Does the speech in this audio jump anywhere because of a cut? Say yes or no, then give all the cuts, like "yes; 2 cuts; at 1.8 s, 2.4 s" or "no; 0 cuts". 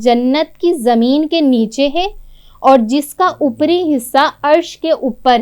no; 0 cuts